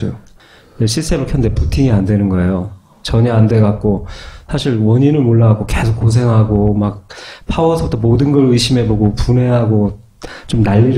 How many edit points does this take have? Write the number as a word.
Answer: one